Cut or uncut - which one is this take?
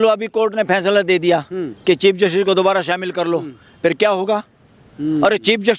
uncut